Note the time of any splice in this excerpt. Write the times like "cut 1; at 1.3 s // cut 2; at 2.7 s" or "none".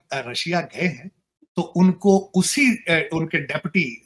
none